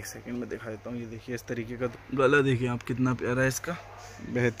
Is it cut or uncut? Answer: cut